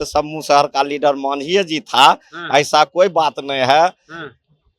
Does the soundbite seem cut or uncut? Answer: uncut